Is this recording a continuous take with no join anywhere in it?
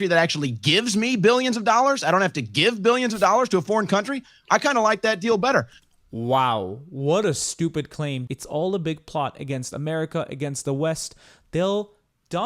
no; 1 cut; at 8.2 s

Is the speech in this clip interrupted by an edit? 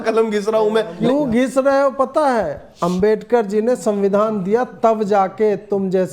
yes; 1 cut; at 1.0 s

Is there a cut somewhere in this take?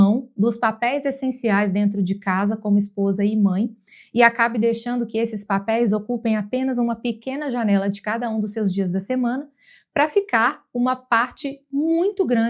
no; 0 cuts

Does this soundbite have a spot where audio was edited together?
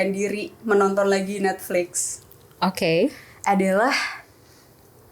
no; 0 cuts

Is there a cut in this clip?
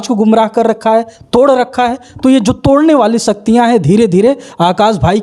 no; 0 cuts

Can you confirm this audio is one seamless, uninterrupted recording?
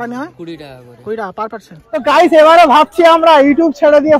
no; 1 cut; at 2.0 s

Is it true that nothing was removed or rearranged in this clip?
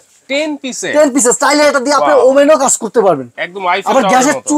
yes; 0 cuts

